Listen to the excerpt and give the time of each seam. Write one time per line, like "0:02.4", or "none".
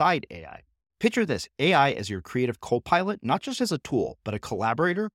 none

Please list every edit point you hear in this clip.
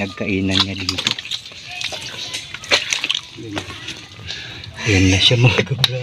none

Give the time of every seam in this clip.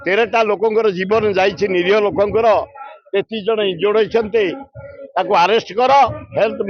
none

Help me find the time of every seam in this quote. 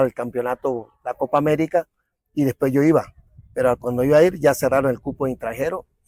none

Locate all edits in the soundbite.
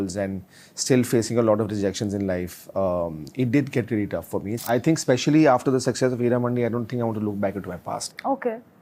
0:04.6

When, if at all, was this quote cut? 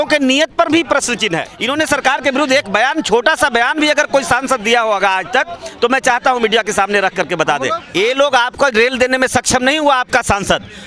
0:01.5
0:07.8

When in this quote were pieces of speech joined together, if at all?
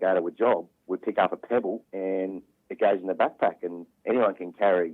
0:01.9
0:03.9

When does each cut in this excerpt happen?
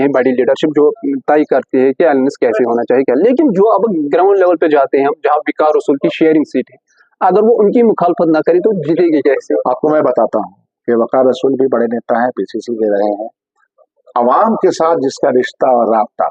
none

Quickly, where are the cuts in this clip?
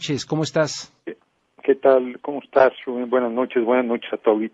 none

